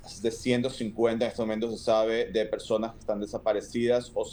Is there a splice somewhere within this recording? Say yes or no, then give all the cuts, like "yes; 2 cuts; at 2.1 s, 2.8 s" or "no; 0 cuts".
no; 0 cuts